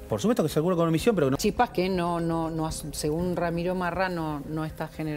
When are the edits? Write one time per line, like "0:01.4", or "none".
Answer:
0:01.4